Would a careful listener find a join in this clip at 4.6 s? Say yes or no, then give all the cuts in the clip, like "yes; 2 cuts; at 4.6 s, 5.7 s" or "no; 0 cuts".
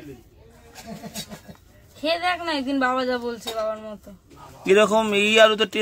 no; 0 cuts